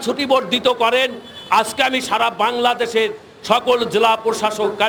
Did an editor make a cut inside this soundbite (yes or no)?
no